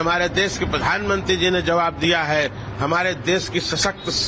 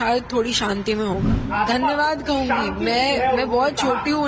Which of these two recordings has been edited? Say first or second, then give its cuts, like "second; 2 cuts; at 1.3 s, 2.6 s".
second; 1 cut; at 1.4 s